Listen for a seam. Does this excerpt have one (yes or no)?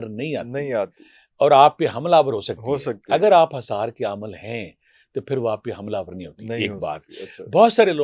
no